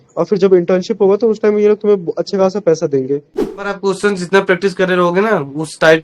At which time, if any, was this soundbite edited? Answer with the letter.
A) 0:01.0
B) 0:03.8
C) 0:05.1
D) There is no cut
B